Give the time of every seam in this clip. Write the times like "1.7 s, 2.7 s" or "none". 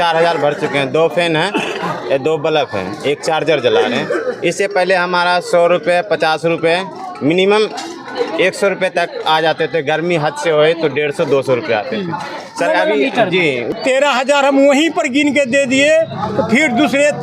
13.7 s